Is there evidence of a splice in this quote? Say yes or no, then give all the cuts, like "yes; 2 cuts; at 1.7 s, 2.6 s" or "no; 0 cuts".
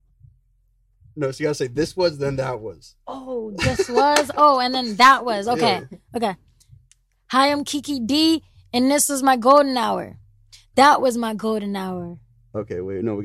no; 0 cuts